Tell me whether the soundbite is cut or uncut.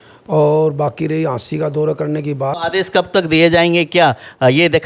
cut